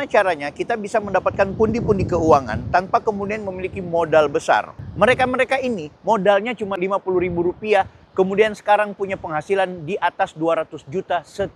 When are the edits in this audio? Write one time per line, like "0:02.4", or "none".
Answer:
0:04.8
0:06.7